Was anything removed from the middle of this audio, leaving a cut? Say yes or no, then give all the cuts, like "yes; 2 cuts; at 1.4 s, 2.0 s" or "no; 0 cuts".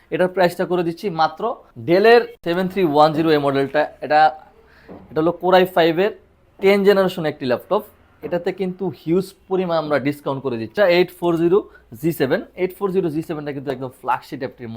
yes; 3 cuts; at 1.7 s, 2.4 s, 10.7 s